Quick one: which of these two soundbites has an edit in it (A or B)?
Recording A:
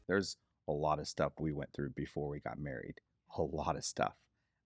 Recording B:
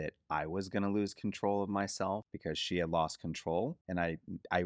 B